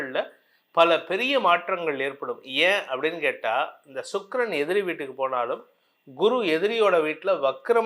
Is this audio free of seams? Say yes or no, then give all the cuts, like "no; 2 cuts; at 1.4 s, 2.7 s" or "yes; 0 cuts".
yes; 0 cuts